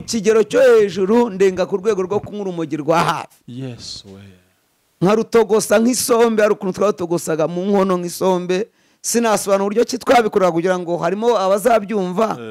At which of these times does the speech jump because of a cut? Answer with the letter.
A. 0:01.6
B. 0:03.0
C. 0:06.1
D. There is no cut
D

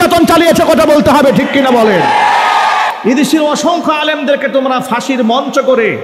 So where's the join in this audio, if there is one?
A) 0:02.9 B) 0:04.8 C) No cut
A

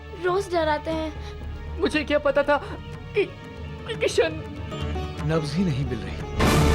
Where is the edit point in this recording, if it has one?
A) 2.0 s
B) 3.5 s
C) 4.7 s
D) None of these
C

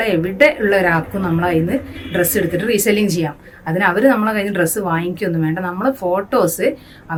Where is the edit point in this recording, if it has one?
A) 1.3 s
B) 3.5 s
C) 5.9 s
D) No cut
D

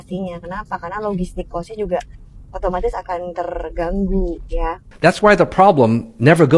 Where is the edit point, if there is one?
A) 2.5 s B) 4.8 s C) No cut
B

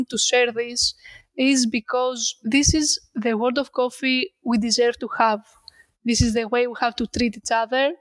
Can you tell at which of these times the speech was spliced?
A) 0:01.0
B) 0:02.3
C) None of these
B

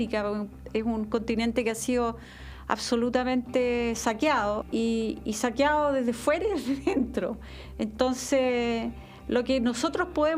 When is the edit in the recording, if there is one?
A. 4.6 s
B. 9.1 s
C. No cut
A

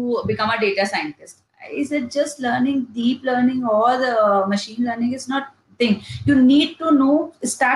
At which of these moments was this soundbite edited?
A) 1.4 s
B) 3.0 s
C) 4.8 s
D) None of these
D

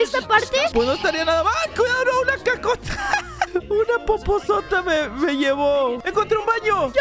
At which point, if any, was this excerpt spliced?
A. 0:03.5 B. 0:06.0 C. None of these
B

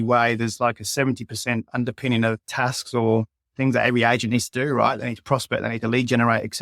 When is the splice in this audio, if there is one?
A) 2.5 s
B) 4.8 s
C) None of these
A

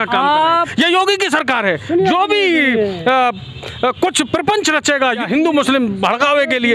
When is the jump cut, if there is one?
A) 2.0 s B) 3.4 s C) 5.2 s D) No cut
C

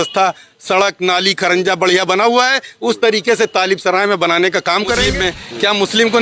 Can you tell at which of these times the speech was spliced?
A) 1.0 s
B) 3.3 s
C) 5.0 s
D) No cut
C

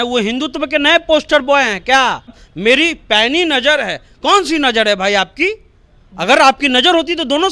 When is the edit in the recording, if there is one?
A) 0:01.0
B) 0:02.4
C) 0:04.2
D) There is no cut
B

